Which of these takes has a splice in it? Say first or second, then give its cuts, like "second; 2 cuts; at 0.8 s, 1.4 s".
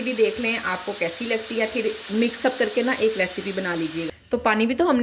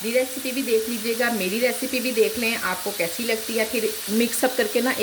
first; 1 cut; at 4.1 s